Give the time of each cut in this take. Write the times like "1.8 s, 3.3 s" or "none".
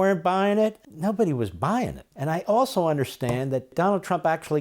0.9 s, 2.1 s, 3.7 s